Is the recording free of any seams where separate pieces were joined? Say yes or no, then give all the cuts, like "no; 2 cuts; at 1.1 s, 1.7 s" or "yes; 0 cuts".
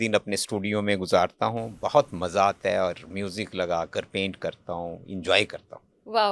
yes; 0 cuts